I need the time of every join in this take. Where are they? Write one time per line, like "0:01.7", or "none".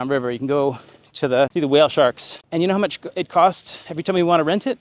0:01.5
0:02.3